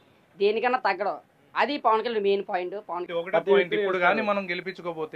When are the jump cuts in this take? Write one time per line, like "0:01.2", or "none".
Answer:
0:03.0